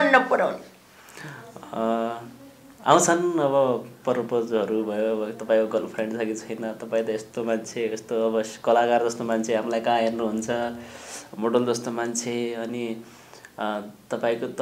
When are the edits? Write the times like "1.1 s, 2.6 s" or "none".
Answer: none